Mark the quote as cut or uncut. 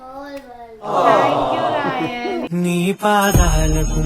cut